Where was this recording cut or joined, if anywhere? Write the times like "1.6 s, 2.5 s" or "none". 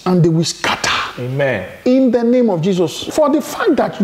3.0 s

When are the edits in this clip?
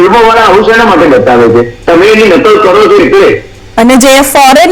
3.5 s

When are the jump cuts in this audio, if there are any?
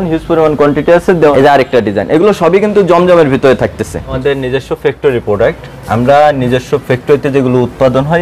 1.3 s, 4.1 s

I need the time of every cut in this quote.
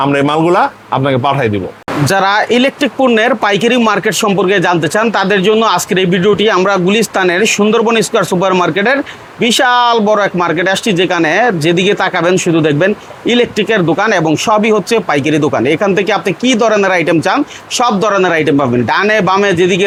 none

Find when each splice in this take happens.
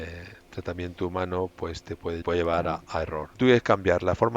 2.2 s, 3.2 s

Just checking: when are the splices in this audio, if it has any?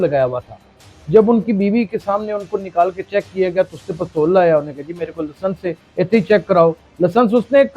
6.9 s

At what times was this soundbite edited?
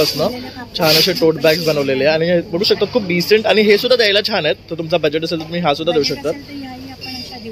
none

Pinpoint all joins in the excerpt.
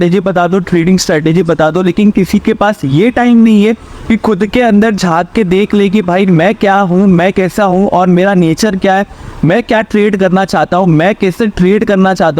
none

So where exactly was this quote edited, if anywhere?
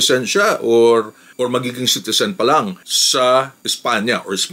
none

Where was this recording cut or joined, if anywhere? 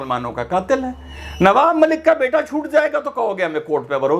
none

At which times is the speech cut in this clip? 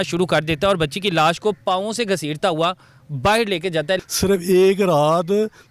4.0 s

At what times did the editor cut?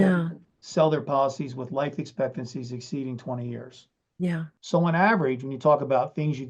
4.6 s

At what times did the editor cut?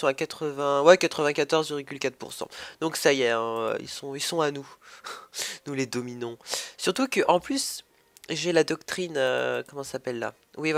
none

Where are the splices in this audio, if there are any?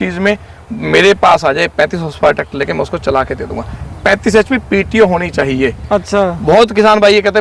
none

